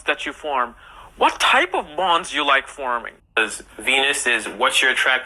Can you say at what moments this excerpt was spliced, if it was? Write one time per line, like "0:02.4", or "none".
0:03.1